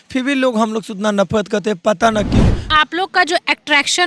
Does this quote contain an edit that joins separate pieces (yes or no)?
yes